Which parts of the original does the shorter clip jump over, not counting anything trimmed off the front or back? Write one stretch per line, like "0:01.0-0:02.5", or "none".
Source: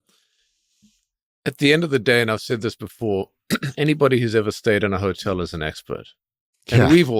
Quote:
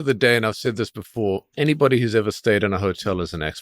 0:03.3-0:03.7